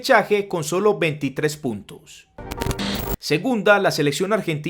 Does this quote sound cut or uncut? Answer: cut